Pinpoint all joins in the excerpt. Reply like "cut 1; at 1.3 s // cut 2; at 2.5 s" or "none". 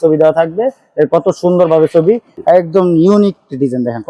cut 1; at 2.3 s

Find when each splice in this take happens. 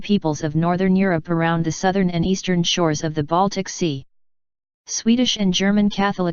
none

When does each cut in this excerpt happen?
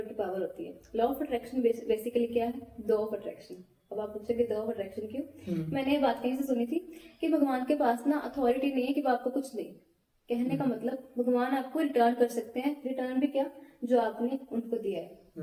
none

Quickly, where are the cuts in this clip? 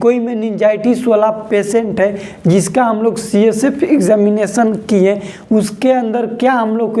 none

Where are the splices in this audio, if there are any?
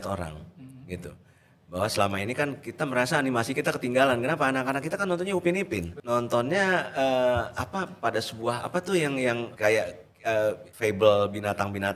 cut 1; at 5.9 s // cut 2; at 9.5 s // cut 3; at 10.7 s

